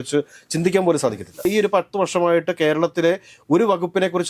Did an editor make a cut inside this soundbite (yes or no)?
yes